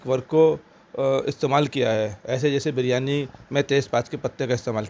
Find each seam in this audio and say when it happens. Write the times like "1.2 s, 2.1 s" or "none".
none